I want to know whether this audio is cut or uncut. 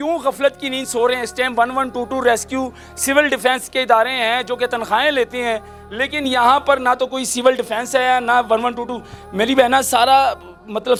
uncut